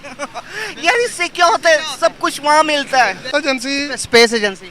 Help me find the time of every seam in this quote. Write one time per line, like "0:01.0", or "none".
0:03.3